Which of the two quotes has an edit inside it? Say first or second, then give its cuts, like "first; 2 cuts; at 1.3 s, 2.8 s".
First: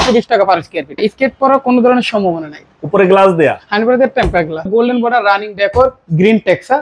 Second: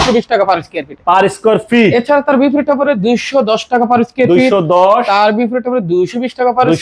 first; 2 cuts; at 0.9 s, 4.7 s